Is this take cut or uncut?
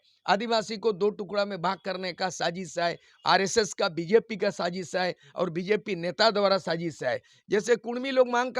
cut